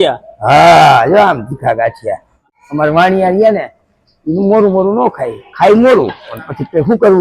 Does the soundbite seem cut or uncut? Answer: cut